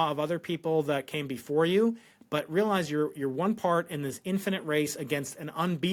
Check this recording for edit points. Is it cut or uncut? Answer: uncut